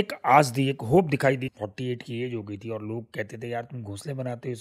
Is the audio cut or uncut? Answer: cut